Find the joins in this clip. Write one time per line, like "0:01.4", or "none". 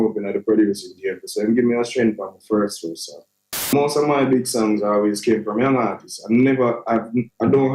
0:03.7